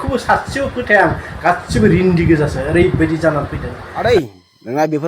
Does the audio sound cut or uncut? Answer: cut